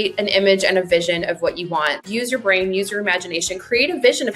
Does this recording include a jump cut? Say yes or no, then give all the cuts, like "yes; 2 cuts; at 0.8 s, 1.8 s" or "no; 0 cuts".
yes; 1 cut; at 2.0 s